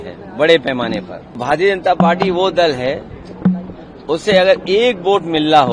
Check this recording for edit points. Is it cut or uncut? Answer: cut